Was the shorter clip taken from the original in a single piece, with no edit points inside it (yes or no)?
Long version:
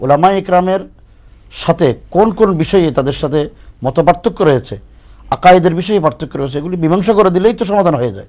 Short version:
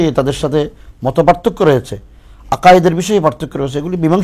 yes